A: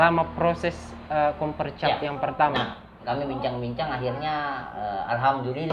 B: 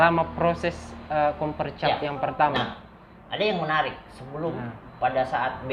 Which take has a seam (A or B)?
A